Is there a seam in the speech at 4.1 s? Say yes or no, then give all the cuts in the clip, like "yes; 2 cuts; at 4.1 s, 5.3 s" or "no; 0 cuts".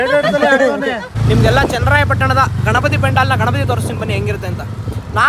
no; 1 cut; at 1.1 s